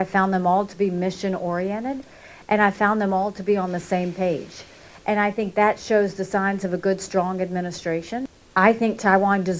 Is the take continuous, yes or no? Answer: no